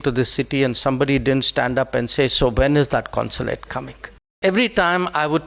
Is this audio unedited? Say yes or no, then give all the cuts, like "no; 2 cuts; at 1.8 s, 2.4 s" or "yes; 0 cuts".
no; 1 cut; at 4.4 s